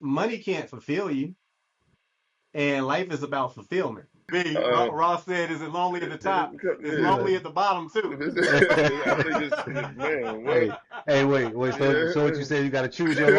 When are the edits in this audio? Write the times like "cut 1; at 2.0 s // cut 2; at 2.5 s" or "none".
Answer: cut 1; at 4.2 s